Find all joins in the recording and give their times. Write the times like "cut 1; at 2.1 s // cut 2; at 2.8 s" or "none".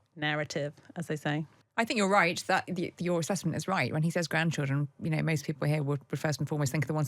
cut 1; at 1.6 s